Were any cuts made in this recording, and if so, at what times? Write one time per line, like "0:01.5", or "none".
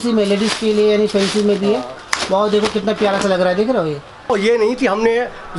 0:04.3